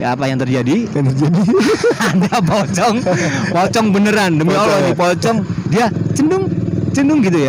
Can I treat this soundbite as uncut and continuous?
yes; 0 cuts

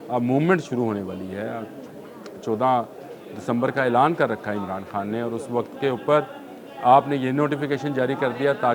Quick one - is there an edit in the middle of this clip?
no; 0 cuts

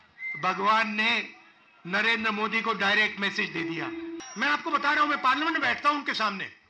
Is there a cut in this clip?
yes; 1 cut; at 4.2 s

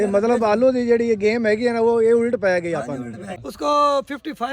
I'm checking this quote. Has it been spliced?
yes; 1 cut; at 3.4 s

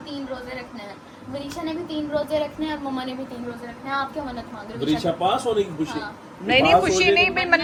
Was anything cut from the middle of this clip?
no; 0 cuts

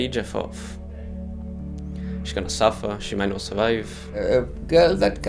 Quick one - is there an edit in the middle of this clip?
yes; 1 cut; at 4.2 s

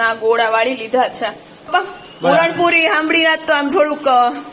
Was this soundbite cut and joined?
yes; 1 cut; at 1.7 s

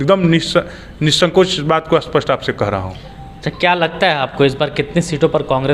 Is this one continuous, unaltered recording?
yes; 0 cuts

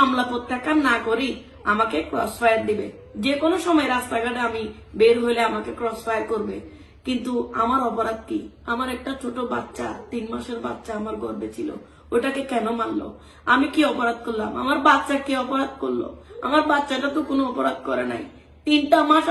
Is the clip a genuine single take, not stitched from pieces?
yes; 0 cuts

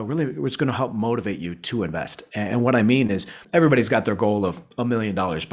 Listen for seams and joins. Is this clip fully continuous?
no; 1 cut; at 3.4 s

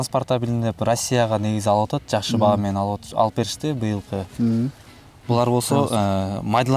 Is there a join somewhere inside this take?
yes; 1 cut; at 4.9 s

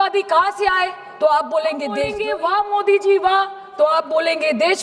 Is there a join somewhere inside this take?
yes; 1 cut; at 2.2 s

